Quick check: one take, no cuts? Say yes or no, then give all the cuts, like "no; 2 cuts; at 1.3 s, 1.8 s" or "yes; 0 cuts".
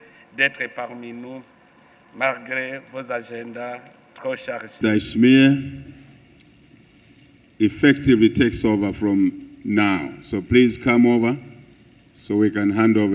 no; 1 cut; at 4.8 s